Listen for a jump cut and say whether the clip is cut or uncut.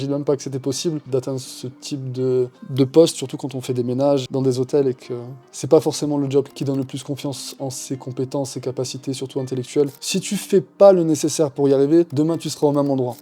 cut